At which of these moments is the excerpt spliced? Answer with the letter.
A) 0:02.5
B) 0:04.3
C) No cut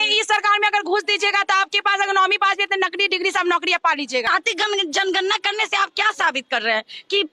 B